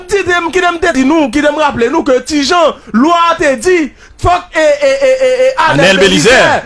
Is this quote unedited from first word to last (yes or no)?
no